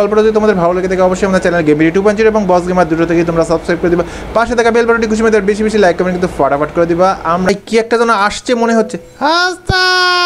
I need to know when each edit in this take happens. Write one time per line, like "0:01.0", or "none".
0:07.5